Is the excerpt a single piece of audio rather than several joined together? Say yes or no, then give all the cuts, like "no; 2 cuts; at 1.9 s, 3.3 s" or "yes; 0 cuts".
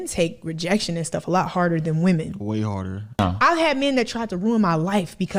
yes; 0 cuts